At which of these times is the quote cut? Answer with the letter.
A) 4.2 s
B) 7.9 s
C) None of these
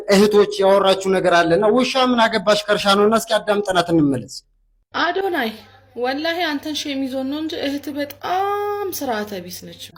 C